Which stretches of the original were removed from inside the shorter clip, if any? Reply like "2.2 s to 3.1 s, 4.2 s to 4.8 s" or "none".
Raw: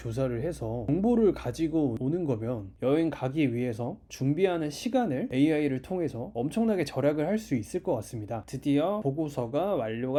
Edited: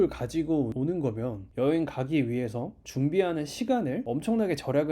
5.3 s to 6.3 s